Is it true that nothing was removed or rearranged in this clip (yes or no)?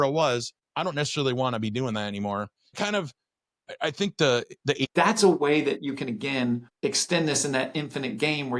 no